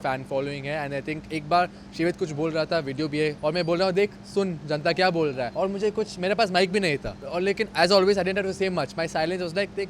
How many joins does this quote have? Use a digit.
3